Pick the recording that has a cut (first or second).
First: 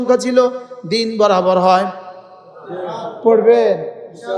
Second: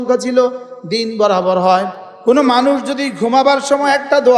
second